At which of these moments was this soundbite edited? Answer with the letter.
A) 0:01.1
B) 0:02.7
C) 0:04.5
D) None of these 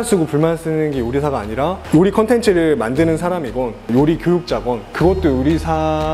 D